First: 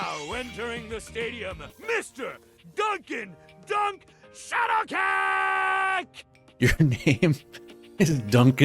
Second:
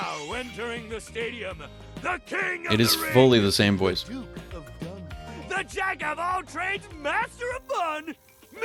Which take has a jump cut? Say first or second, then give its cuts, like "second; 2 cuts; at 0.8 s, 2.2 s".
first; 1 cut; at 1.7 s